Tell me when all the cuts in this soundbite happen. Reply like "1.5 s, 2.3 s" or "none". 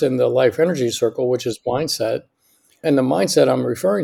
2.8 s